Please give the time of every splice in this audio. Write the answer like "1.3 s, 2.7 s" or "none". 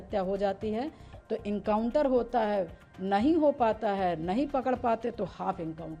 none